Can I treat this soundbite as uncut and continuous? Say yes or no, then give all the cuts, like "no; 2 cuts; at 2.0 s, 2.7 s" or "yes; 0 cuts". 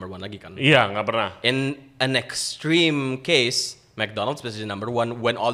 yes; 0 cuts